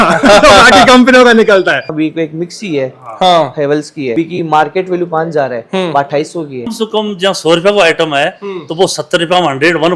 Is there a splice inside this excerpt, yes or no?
yes